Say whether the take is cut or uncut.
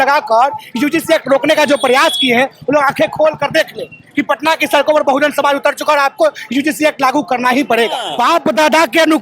cut